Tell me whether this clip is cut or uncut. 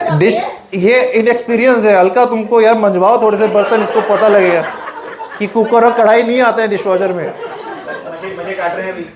uncut